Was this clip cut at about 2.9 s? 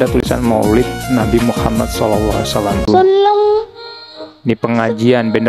yes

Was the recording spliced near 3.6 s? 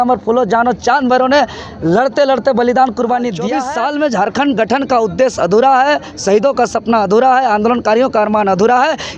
yes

